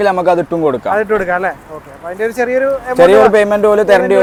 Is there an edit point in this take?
no; 0 cuts

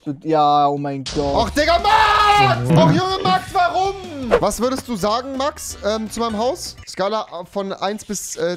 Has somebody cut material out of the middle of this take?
yes; 2 cuts; at 2.7 s, 4.3 s

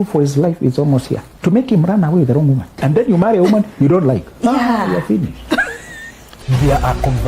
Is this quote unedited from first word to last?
no; 3 cuts; at 1.3 s, 2.8 s, 6.3 s

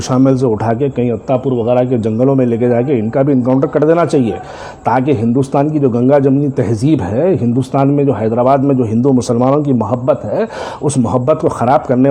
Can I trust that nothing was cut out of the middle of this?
yes; 0 cuts

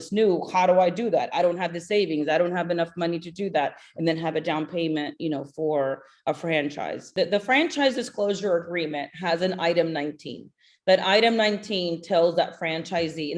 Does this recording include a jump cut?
yes; 1 cut; at 7.1 s

